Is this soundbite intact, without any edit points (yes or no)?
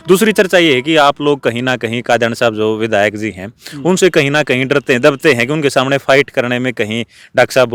yes